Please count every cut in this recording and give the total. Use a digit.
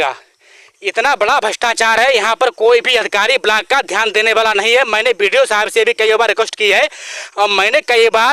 0